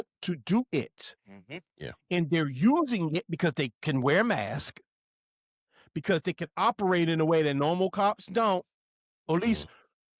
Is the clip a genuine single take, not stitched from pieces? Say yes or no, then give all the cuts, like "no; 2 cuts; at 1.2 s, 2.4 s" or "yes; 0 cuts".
yes; 0 cuts